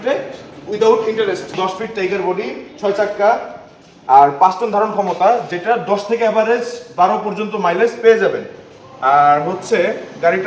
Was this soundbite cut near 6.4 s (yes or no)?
no